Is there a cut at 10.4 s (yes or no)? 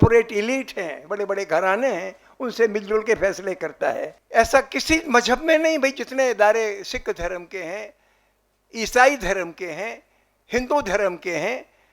no